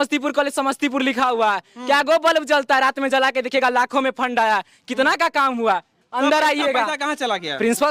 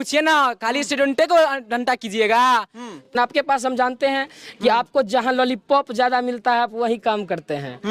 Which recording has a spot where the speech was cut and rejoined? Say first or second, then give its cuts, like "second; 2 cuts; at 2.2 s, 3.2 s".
second; 1 cut; at 3.2 s